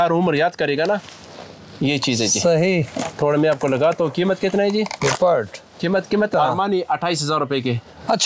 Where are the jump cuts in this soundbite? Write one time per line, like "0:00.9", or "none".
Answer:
0:06.3

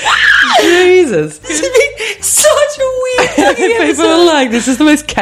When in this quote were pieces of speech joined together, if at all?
0:01.4

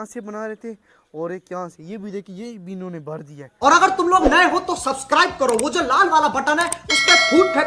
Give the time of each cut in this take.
0:03.9

